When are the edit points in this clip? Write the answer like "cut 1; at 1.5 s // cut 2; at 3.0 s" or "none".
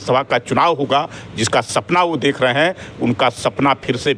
none